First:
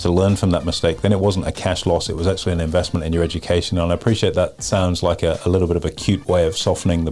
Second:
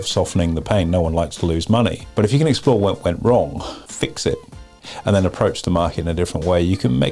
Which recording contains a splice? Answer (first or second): second